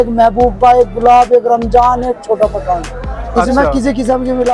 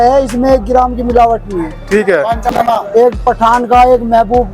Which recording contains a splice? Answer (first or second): second